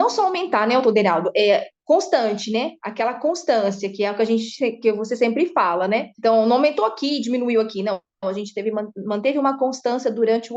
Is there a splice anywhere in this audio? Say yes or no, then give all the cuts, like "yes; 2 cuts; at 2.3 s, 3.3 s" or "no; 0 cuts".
no; 0 cuts